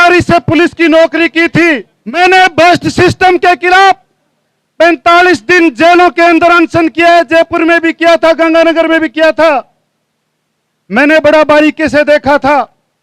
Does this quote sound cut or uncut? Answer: cut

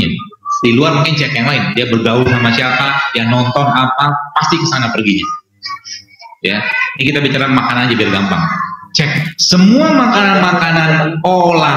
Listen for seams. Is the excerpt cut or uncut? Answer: uncut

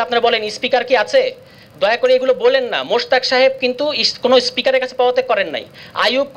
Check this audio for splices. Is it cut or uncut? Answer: uncut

